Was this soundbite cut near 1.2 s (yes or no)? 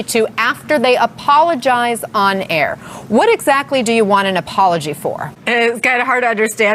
no